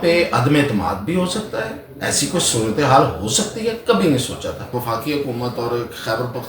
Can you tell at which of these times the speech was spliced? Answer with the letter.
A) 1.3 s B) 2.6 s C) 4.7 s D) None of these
C